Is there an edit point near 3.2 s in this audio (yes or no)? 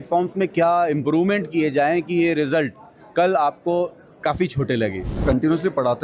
no